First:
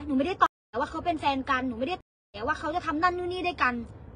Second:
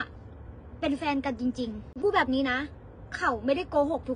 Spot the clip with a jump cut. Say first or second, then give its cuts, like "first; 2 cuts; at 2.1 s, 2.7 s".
second; 1 cut; at 2.0 s